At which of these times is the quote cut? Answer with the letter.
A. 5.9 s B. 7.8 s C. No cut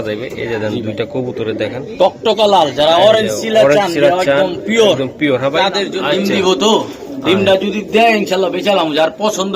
A